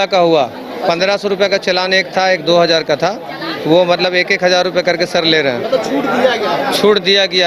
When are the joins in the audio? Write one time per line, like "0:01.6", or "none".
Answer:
none

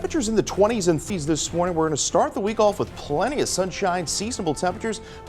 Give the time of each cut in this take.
0:01.1

